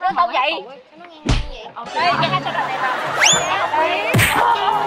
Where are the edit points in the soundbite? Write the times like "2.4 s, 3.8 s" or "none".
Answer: none